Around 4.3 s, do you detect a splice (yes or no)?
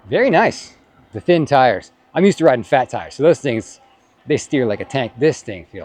no